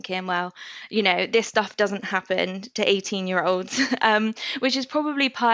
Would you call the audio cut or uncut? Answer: uncut